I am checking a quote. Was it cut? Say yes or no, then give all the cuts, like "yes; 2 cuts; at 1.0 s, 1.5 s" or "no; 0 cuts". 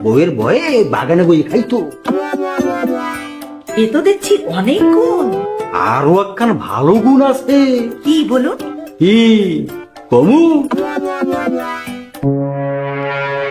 no; 0 cuts